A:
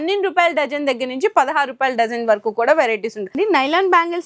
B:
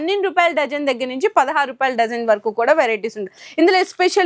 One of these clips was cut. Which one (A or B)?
A